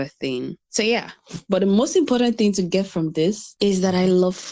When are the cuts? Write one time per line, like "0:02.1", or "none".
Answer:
0:03.5